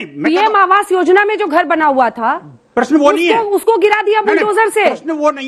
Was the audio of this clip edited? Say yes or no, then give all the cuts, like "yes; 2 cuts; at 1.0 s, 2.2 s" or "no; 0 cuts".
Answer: no; 0 cuts